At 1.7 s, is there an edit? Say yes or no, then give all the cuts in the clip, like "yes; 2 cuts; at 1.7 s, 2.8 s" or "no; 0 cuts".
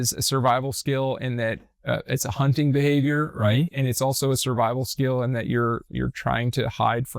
no; 0 cuts